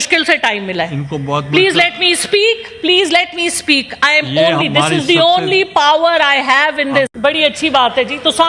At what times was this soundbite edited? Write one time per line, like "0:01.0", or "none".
0:07.1